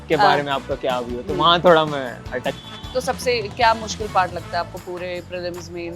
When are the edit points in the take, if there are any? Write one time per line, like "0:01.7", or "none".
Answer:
0:02.5